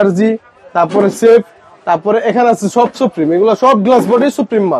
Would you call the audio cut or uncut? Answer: uncut